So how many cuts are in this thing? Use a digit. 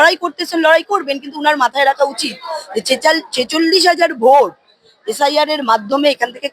0